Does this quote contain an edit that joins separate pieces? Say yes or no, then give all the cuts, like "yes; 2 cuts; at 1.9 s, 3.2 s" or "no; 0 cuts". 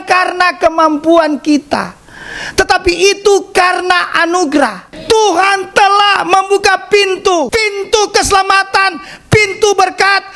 yes; 2 cuts; at 4.9 s, 7.5 s